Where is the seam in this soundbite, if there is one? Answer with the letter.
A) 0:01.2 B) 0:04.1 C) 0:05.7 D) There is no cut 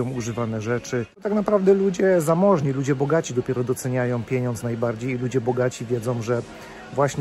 A